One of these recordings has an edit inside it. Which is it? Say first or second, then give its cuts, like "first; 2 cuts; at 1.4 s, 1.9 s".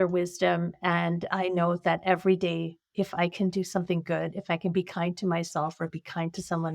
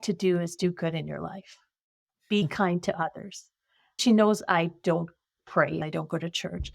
second; 2 cuts; at 4.0 s, 5.8 s